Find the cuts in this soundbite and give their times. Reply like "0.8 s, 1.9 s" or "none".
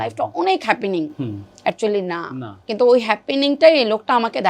2.5 s